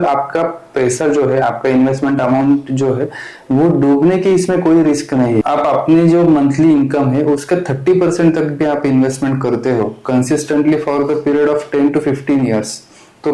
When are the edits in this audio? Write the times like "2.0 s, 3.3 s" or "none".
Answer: 5.4 s